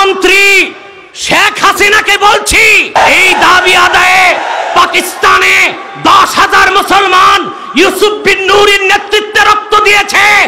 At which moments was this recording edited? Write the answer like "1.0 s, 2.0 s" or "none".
2.9 s